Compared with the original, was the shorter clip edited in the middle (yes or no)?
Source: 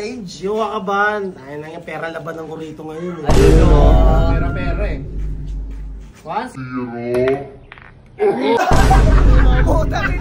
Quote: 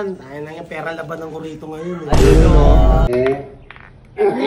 yes